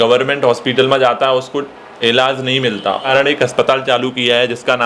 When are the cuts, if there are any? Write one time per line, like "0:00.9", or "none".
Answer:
0:03.1